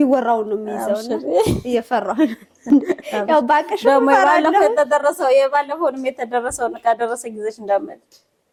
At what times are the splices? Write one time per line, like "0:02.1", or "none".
none